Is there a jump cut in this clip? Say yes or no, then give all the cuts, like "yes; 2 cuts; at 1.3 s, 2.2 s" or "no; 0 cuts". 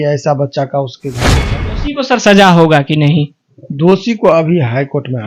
yes; 1 cut; at 1.3 s